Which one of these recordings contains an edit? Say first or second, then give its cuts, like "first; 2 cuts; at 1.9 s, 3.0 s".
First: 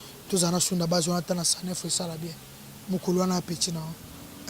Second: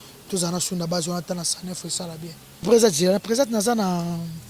second; 1 cut; at 2.7 s